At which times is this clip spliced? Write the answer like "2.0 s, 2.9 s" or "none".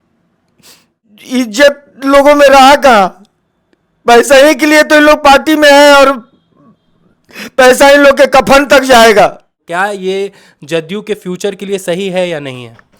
1.1 s, 9.6 s